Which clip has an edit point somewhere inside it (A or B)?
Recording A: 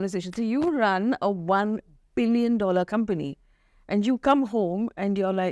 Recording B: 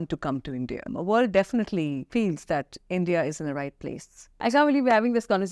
B